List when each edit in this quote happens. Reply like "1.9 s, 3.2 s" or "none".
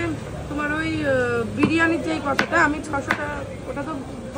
none